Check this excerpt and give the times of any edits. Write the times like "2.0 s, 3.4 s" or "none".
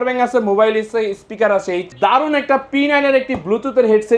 1.9 s

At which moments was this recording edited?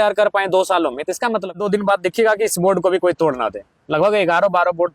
1.6 s

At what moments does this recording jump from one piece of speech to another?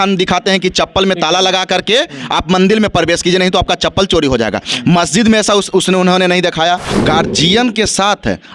6.9 s

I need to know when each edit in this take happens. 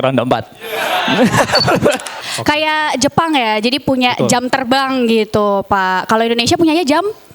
2.2 s

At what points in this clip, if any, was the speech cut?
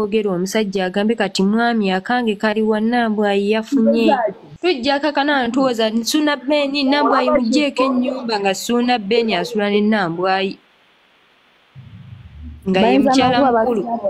4.5 s

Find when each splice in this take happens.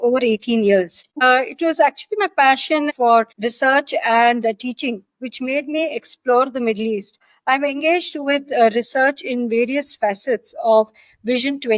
1.2 s, 3.1 s, 7.1 s

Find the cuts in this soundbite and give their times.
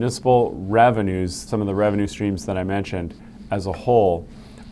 1.4 s

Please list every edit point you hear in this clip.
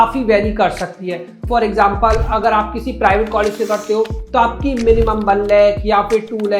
1.4 s

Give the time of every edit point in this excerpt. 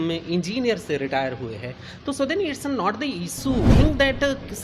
3.7 s

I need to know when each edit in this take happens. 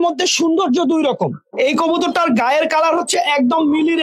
1.4 s

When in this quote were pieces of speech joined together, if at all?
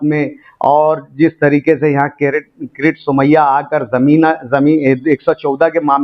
none

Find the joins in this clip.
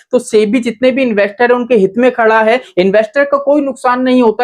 2.7 s

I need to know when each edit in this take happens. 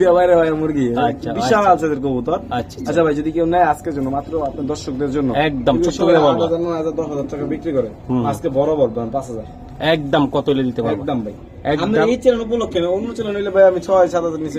none

